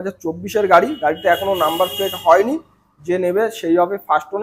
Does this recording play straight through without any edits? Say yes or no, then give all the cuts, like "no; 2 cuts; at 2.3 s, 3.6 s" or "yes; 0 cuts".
yes; 0 cuts